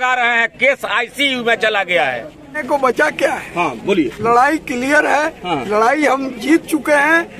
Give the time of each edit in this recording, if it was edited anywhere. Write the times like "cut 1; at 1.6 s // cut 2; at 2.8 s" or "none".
cut 1; at 2.6 s